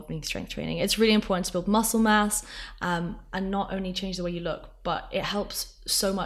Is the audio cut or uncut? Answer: uncut